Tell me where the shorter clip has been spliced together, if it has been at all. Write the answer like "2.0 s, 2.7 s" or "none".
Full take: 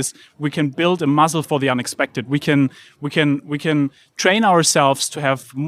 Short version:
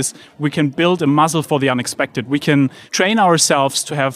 2.8 s